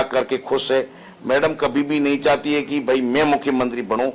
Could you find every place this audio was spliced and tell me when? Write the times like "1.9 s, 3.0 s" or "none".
none